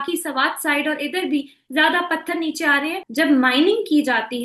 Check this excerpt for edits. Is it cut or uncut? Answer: cut